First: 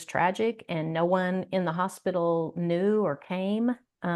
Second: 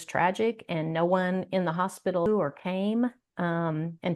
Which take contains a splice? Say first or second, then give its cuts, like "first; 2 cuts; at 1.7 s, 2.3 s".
second; 1 cut; at 2.3 s